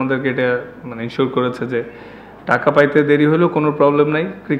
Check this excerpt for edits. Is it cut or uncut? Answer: uncut